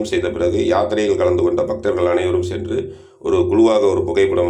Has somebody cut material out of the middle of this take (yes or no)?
no